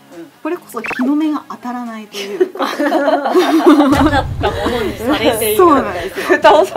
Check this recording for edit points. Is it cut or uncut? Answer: uncut